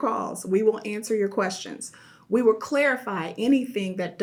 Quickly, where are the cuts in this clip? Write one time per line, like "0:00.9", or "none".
none